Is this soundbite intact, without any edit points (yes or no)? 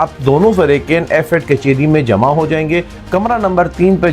no